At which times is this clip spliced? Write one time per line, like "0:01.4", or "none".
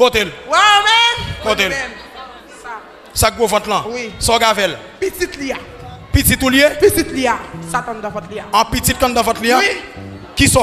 none